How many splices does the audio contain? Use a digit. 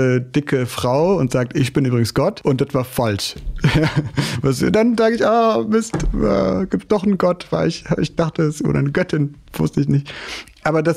1